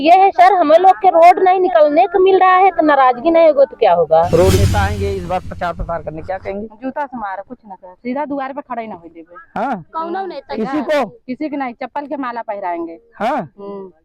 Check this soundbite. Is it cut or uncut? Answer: cut